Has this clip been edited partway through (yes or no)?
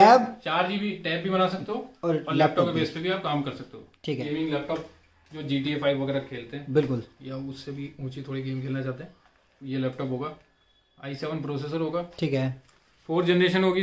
yes